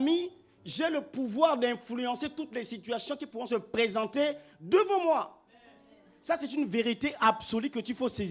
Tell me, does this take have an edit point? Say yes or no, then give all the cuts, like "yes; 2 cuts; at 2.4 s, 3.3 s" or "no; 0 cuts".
no; 0 cuts